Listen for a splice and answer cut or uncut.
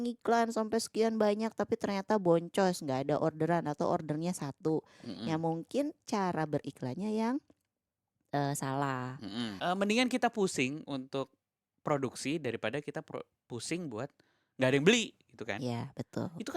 cut